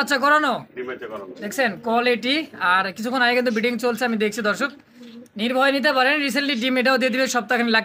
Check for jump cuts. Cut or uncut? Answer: uncut